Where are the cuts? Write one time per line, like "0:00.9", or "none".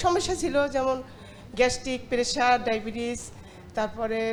none